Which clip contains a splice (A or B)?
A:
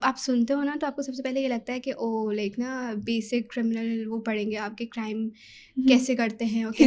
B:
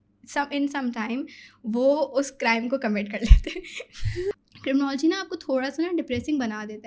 B